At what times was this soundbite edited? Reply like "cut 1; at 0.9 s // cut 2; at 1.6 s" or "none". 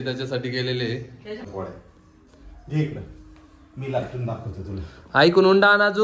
cut 1; at 1.5 s

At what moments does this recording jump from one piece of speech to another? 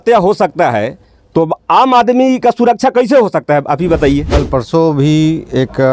cut 1; at 4.4 s

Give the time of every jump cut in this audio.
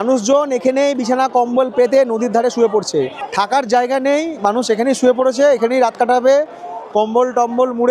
cut 1; at 3.1 s

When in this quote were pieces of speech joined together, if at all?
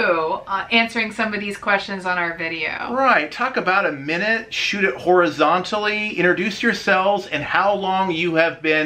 none

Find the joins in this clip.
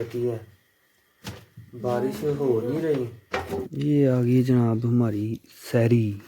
cut 1; at 3.7 s

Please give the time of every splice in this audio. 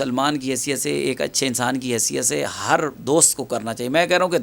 none

